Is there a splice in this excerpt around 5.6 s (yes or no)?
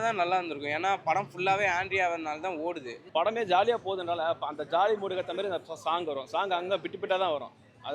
no